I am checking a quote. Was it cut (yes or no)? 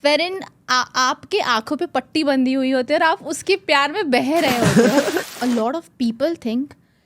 yes